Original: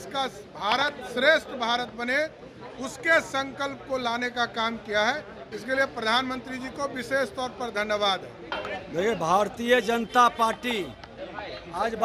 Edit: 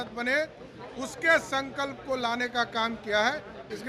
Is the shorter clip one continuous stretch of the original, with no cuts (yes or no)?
yes